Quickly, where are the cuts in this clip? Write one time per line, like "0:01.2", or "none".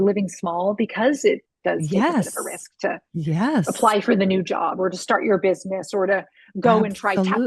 none